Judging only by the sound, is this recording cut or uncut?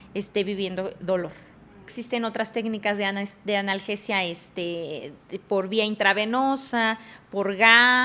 cut